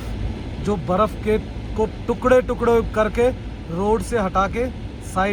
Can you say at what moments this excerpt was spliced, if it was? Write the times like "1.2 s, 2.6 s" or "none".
none